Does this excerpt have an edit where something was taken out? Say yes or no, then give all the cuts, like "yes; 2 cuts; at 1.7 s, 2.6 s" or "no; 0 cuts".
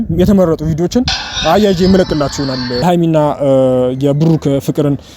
yes; 1 cut; at 2.8 s